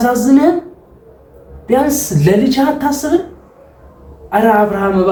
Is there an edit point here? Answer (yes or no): no